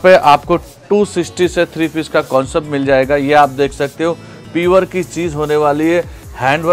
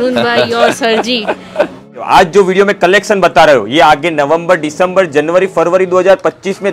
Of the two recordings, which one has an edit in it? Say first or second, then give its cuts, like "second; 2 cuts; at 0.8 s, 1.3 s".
second; 1 cut; at 2.0 s